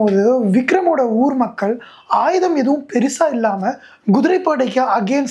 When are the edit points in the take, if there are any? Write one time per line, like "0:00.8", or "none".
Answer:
none